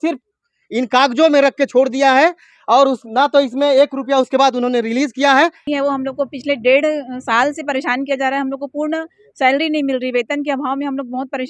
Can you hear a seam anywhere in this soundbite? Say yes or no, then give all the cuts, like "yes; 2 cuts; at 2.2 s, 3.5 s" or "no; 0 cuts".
yes; 1 cut; at 5.6 s